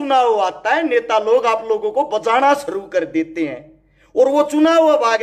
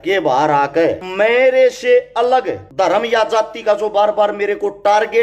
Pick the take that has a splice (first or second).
second